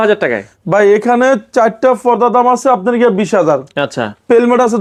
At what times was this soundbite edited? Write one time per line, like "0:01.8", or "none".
none